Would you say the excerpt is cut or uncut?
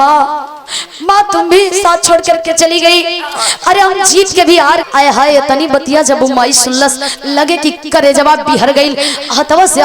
cut